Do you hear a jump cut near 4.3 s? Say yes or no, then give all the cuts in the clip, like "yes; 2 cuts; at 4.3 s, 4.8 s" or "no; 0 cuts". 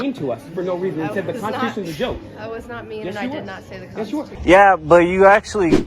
yes; 1 cut; at 4.3 s